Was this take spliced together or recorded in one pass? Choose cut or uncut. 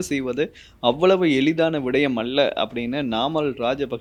uncut